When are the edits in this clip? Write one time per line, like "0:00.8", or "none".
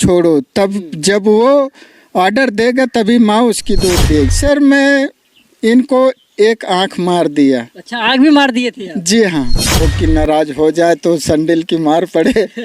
0:04.3
0:09.9